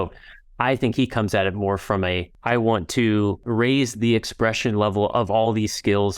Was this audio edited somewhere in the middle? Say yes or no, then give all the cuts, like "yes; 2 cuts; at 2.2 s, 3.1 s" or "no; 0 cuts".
yes; 2 cuts; at 2.3 s, 3.4 s